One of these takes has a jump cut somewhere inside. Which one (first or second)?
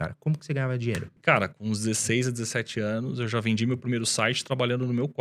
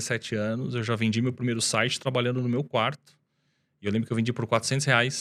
first